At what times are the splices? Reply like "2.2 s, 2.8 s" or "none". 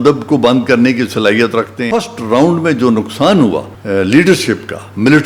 1.8 s, 3.7 s